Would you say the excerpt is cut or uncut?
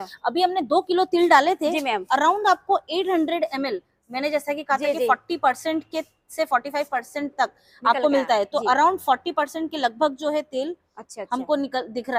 uncut